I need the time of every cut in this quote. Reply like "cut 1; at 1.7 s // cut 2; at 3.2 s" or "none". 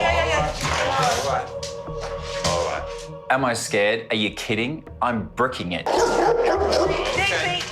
cut 1; at 5.8 s